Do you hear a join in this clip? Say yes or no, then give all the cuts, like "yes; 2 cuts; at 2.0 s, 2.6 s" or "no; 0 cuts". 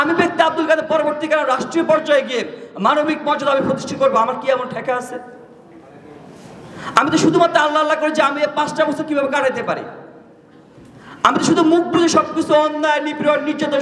no; 0 cuts